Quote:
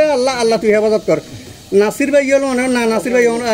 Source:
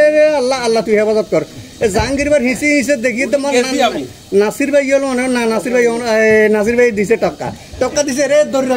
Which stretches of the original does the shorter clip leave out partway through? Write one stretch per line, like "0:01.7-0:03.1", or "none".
0:01.7-0:04.0